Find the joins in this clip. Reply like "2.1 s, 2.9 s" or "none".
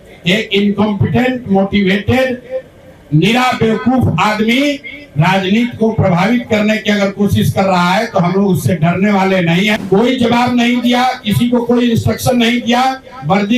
9.8 s